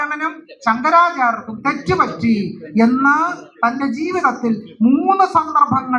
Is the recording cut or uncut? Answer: uncut